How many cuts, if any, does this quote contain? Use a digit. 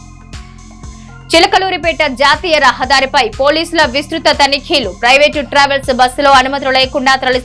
1